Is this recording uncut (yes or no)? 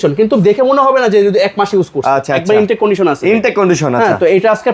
yes